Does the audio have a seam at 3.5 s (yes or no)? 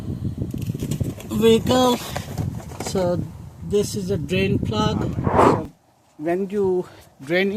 no